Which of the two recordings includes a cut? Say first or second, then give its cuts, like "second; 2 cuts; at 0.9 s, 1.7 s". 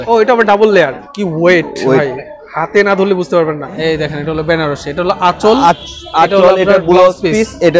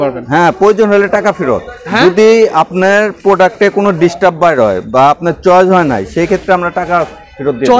first; 2 cuts; at 1.0 s, 3.8 s